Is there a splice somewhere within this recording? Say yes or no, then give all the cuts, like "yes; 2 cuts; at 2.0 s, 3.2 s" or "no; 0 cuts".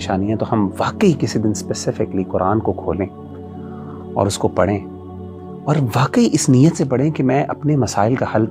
no; 0 cuts